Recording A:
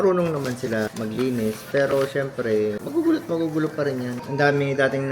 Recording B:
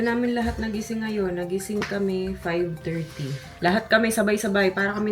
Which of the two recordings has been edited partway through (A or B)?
A